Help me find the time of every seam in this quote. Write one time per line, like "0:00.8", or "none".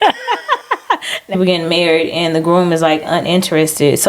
0:01.4